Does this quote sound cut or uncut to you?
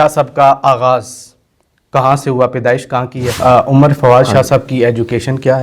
cut